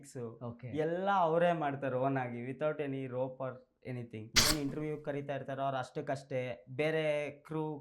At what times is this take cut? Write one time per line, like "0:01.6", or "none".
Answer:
0:04.5

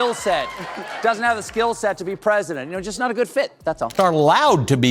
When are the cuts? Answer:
0:03.9

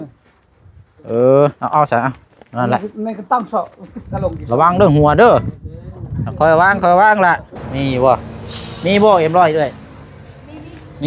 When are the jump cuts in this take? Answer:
0:07.6

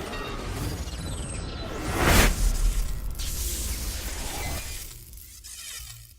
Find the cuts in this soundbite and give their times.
0:03.0

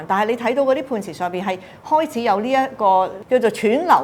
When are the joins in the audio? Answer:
none

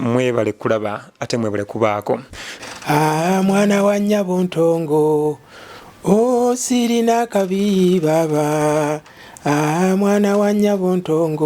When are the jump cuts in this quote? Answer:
0:02.4

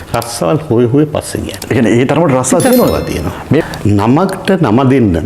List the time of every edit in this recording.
0:03.6

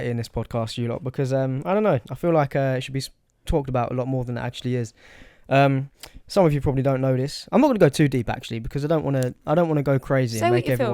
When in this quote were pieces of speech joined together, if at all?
none

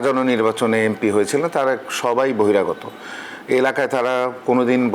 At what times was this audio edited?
none

